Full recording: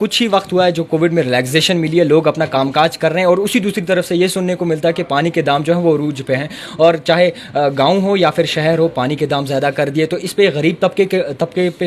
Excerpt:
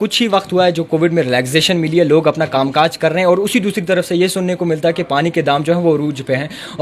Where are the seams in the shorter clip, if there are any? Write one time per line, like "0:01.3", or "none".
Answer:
none

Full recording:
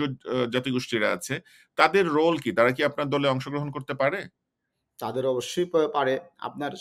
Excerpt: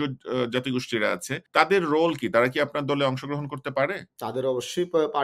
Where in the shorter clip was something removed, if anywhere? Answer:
0:01.3
0:04.1

